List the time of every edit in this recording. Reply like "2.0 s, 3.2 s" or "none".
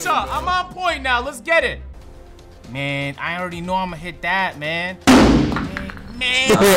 1.9 s